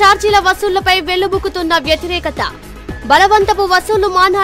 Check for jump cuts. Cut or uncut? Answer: uncut